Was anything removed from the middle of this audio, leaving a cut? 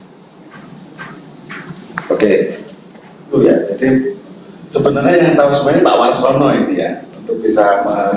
yes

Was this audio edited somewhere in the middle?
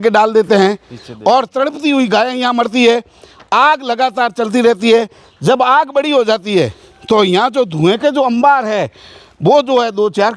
no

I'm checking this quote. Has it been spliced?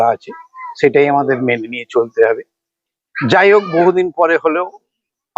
no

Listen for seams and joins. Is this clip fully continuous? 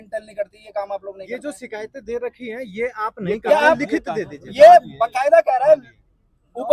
yes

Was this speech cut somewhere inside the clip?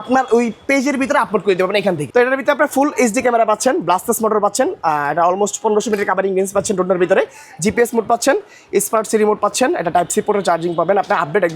yes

